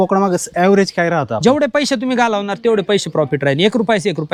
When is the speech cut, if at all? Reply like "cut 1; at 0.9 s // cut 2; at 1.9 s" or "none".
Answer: none